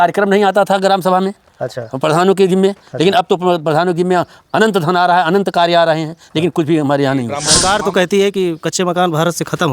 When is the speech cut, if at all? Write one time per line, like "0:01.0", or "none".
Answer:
0:07.5